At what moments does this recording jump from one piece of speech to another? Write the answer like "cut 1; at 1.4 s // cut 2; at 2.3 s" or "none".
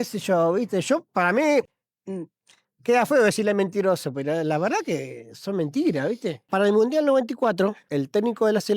cut 1; at 6.4 s // cut 2; at 7.8 s